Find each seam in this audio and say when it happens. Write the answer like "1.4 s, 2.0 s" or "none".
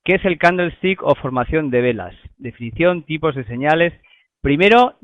3.7 s